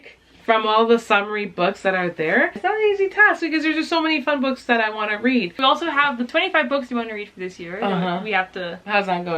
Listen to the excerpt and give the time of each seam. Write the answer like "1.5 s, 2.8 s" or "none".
2.6 s, 5.9 s